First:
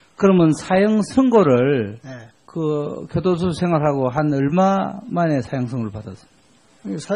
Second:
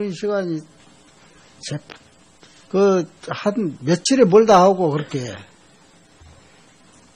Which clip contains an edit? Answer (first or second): second